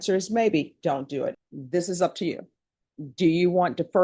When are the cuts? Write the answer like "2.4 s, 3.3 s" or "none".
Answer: 1.4 s